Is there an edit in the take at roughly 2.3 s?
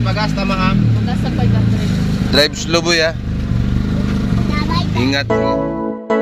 no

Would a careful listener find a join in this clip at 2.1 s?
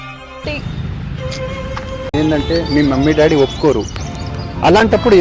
yes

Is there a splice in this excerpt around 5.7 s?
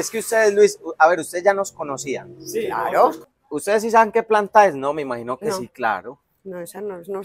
no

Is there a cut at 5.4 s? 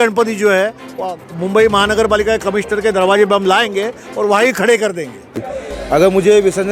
yes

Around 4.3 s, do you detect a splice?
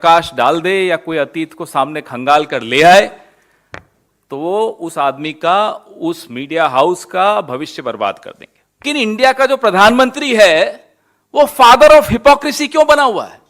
no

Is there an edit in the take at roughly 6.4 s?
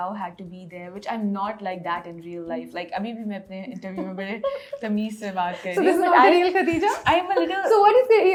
no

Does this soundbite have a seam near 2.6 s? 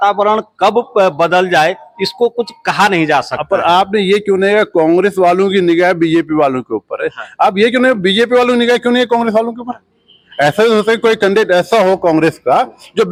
no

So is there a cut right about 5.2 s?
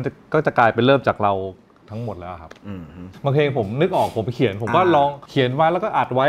yes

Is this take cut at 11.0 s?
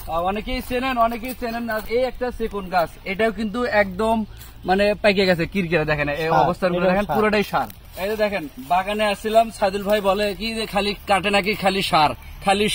no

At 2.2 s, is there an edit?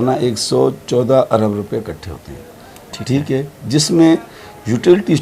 no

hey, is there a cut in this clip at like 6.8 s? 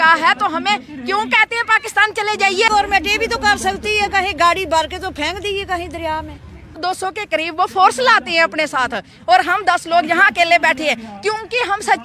yes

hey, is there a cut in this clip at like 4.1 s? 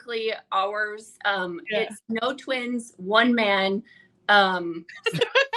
no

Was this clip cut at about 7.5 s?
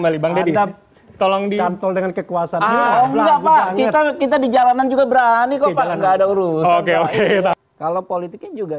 yes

